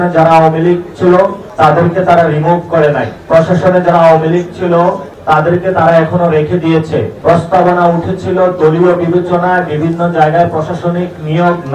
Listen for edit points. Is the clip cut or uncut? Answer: uncut